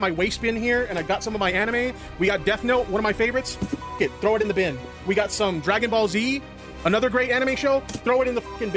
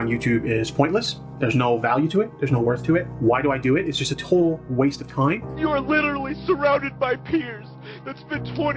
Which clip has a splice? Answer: second; 1 cut; at 5.5 s

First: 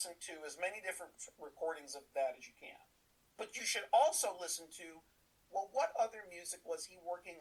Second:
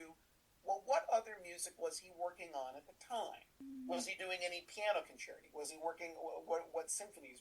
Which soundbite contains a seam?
second; 1 cut; at 3.6 s

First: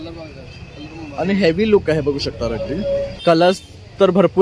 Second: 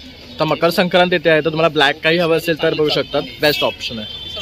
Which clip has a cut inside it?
first; 1 cut; at 3.1 s

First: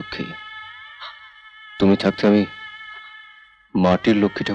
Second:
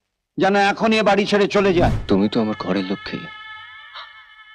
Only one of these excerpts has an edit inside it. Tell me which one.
second; 1 cut; at 2.0 s

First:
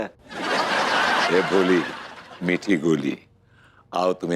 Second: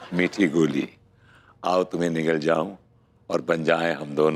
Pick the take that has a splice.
first; 1 cut; at 1.3 s

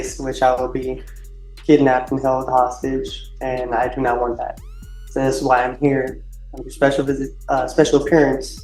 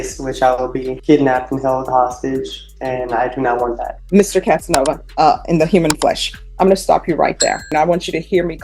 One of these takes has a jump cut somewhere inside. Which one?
second; 4 cuts; at 0.9 s, 3.9 s, 5.0 s, 7.7 s

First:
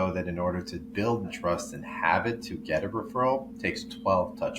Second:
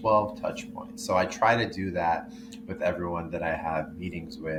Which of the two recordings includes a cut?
first; 1 cut; at 1.3 s

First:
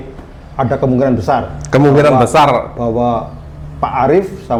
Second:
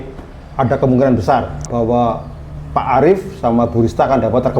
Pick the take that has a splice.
second; 1 cut; at 1.6 s

